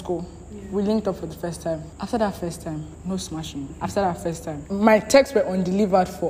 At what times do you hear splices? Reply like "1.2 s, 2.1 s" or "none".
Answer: 1.9 s, 2.9 s, 3.7 s, 4.6 s